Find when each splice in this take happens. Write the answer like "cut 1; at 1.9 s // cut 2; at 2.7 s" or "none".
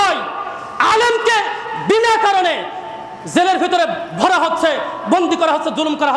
none